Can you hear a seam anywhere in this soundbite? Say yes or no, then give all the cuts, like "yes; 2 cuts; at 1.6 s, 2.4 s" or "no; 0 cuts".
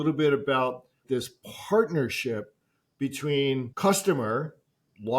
yes; 1 cut; at 0.9 s